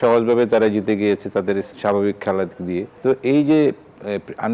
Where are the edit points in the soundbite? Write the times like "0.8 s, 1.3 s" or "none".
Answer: 1.7 s, 2.9 s